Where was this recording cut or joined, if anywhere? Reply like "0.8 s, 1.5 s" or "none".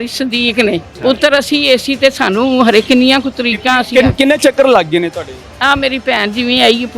0.9 s, 5.4 s